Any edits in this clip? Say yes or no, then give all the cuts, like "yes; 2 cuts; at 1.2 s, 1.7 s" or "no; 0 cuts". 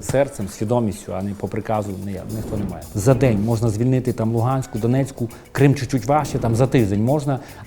yes; 1 cut; at 2.8 s